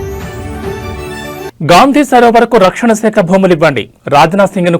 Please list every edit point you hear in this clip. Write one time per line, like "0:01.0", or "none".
0:01.3

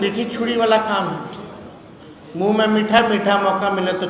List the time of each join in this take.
none

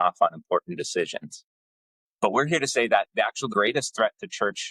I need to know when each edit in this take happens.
0:03.5

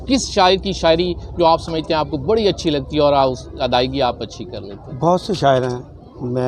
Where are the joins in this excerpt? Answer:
none

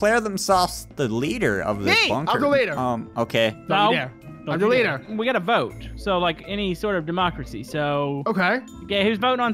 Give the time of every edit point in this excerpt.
none

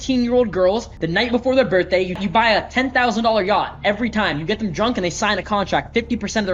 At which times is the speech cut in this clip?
0:00.9
0:02.2

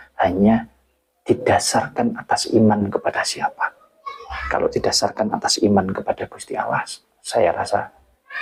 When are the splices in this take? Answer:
none

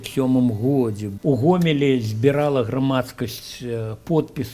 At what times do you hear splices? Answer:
0:01.1

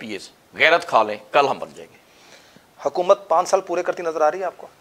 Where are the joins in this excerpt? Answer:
none

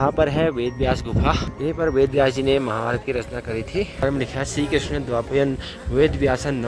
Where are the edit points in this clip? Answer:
0:01.5
0:04.0

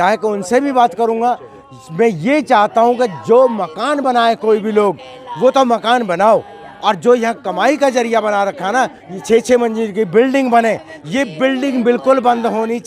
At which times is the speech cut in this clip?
none

